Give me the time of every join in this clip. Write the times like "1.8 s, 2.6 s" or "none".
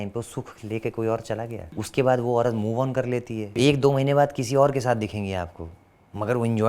1.7 s, 3.5 s